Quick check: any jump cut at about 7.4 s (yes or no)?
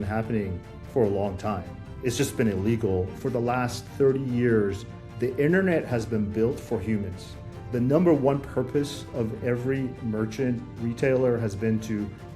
yes